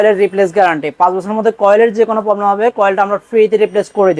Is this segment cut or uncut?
uncut